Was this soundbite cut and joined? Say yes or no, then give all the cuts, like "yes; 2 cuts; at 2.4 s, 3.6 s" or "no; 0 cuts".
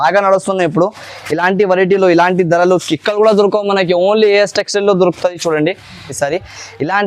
yes; 1 cut; at 6.2 s